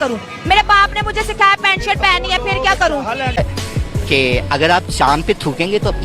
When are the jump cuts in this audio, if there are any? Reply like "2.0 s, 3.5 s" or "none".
3.4 s

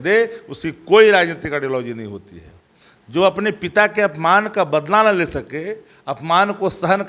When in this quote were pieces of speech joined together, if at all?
none

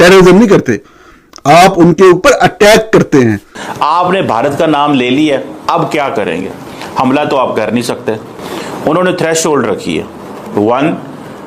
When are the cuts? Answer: 3.5 s

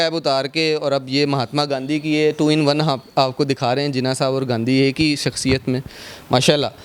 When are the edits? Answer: none

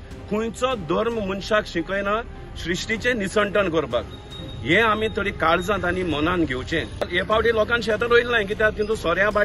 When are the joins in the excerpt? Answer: 7.2 s

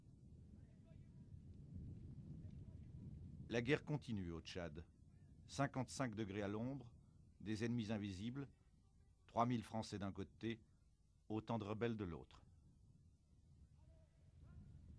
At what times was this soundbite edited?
none

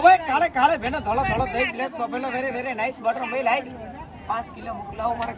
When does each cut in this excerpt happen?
none

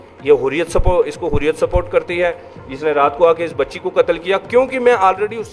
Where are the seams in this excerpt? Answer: none

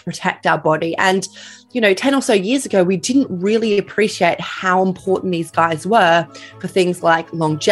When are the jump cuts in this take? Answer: none

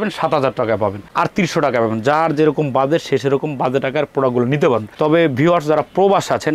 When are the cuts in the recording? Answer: none

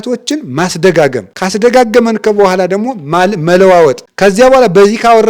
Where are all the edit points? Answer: 1.3 s, 4.1 s

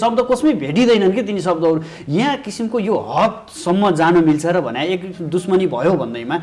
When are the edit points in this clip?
none

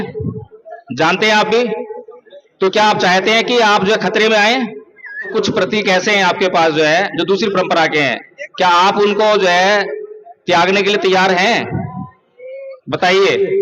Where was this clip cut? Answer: 5.3 s

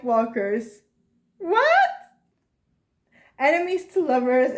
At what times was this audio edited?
2.8 s

